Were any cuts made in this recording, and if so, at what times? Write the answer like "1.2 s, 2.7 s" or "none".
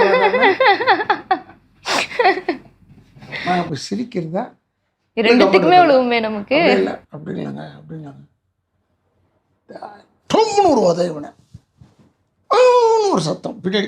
none